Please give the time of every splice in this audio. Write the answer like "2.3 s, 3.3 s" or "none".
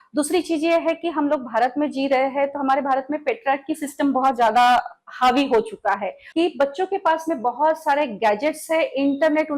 6.2 s